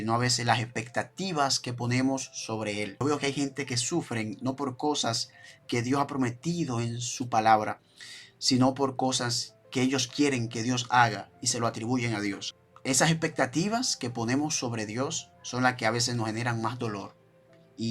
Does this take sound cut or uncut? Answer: cut